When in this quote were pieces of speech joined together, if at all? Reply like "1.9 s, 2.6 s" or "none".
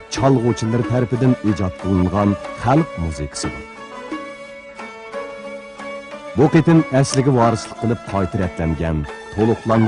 6.0 s